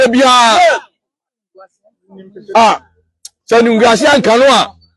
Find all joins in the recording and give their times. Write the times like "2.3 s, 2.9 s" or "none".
2.9 s